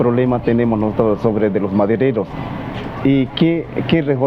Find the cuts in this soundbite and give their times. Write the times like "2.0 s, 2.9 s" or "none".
none